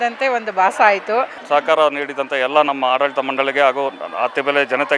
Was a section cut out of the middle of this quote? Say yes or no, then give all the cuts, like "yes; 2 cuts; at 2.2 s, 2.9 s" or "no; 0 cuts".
yes; 1 cut; at 1.4 s